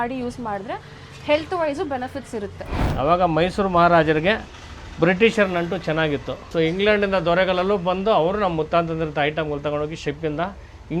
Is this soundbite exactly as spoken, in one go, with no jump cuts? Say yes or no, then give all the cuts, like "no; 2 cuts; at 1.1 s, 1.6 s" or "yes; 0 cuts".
no; 2 cuts; at 2.8 s, 6.4 s